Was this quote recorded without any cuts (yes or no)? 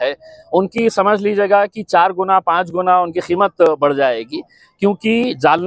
yes